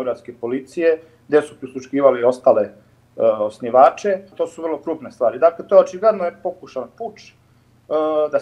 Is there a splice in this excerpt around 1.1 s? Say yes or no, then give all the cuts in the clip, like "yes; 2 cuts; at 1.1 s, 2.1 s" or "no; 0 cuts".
no; 1 cut; at 4.3 s